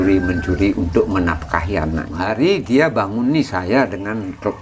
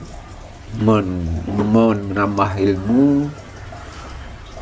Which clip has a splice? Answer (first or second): first